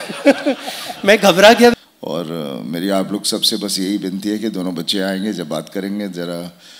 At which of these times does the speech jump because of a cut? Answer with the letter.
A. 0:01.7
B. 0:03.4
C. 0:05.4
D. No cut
A